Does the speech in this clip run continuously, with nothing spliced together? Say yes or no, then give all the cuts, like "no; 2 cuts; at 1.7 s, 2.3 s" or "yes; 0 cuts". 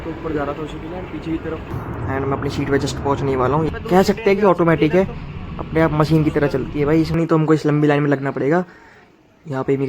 no; 3 cuts; at 1.7 s, 3.7 s, 7.2 s